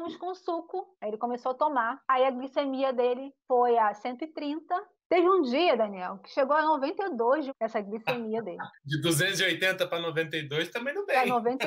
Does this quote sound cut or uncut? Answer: cut